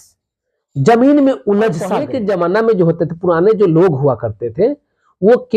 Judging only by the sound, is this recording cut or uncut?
cut